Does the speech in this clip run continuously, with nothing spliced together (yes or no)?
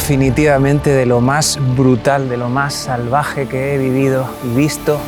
yes